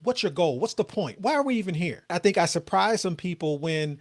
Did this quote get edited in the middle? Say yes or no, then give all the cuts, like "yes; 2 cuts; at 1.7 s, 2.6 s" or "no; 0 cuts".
yes; 1 cut; at 2.1 s